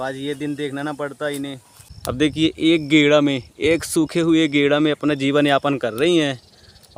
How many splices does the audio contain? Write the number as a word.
zero